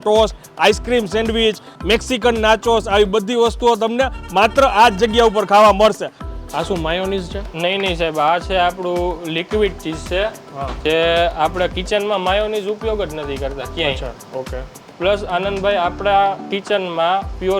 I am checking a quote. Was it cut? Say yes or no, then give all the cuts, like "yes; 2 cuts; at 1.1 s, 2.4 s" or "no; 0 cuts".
yes; 2 cuts; at 6.1 s, 14.8 s